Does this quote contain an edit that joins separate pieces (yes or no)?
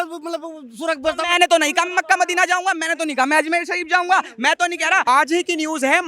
yes